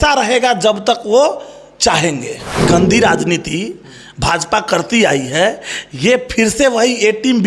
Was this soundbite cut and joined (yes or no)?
yes